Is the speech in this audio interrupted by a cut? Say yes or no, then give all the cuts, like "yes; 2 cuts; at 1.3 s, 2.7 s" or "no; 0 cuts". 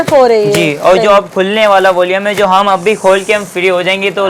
no; 0 cuts